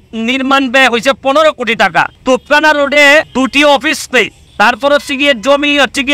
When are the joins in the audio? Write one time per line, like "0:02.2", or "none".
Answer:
0:02.1
0:03.3
0:04.4